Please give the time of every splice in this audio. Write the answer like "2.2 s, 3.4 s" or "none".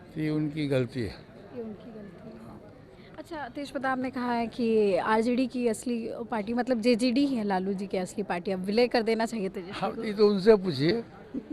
none